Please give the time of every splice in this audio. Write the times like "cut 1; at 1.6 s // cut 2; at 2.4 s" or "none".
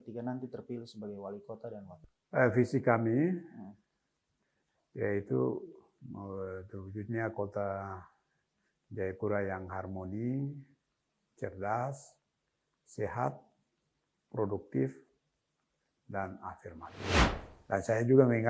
cut 1; at 2.0 s // cut 2; at 17.2 s